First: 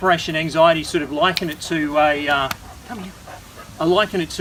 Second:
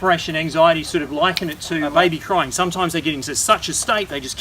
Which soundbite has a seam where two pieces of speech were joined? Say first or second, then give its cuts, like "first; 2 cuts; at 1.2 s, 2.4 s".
second; 1 cut; at 1.9 s